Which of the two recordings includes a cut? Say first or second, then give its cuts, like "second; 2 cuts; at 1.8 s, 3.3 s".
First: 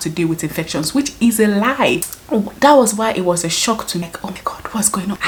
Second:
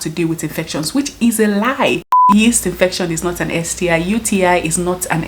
second; 1 cut; at 2.1 s